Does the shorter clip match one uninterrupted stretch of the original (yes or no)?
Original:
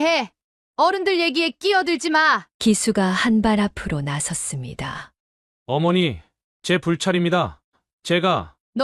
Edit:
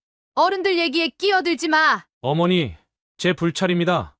no